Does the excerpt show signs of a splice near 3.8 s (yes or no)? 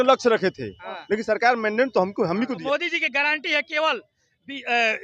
no